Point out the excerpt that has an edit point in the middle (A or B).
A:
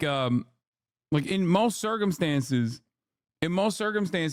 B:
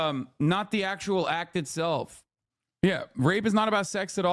B